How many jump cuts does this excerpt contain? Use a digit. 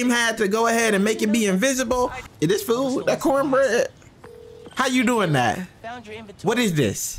1